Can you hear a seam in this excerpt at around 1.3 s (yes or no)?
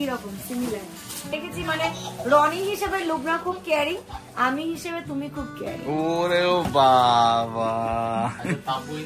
yes